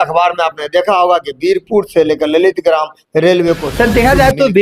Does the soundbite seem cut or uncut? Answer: cut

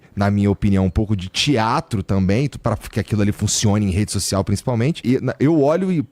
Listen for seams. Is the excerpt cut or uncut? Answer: cut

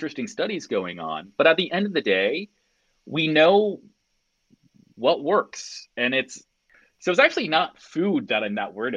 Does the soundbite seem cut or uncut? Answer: cut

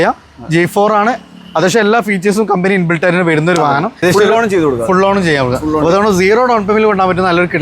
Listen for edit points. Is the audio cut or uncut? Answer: cut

